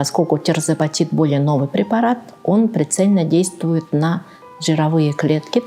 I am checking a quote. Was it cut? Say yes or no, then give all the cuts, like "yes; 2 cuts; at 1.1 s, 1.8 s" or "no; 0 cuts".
no; 0 cuts